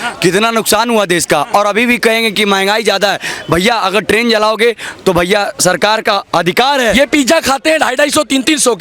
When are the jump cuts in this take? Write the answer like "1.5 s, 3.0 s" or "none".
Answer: 6.9 s